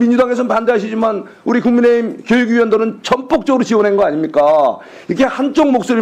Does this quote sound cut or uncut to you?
uncut